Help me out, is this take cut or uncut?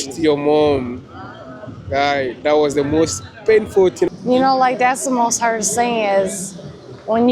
cut